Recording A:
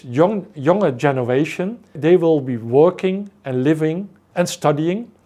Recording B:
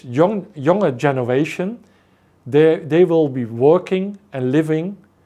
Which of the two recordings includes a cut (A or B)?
A